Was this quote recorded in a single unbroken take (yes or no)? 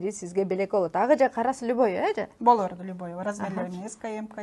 yes